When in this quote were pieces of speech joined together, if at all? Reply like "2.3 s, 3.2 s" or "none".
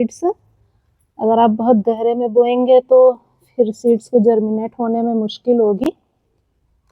none